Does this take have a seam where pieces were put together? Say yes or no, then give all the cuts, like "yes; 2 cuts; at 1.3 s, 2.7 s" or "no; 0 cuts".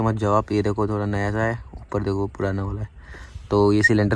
no; 0 cuts